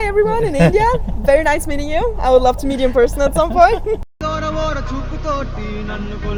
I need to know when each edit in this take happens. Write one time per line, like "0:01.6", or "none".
none